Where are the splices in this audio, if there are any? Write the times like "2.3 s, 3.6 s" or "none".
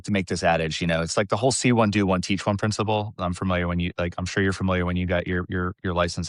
none